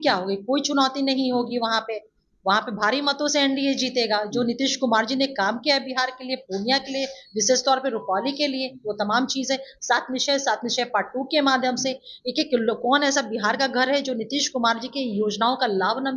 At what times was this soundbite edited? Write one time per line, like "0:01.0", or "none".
none